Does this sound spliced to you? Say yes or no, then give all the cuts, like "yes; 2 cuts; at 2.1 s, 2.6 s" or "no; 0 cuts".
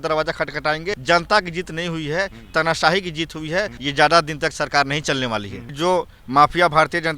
yes; 3 cuts; at 1.0 s, 3.8 s, 5.6 s